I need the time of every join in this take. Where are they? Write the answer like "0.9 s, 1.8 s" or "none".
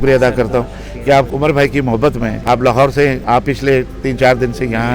1.3 s, 2.4 s, 3.2 s